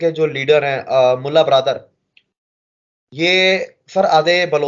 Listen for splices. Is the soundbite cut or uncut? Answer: uncut